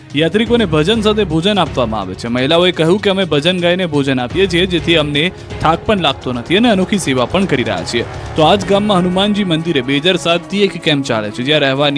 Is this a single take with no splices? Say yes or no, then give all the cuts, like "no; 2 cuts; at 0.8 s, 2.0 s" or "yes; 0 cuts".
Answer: yes; 0 cuts